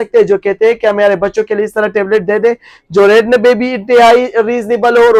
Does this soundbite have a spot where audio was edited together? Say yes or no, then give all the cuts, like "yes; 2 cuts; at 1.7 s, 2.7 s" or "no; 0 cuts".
no; 0 cuts